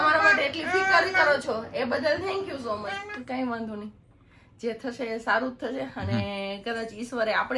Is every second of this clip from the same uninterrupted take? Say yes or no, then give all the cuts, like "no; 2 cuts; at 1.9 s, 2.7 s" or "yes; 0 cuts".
no; 1 cut; at 3.0 s